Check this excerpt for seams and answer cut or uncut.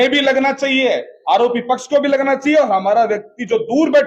uncut